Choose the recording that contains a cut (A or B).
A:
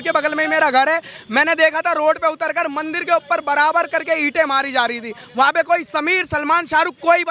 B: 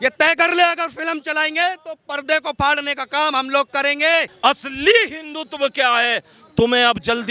B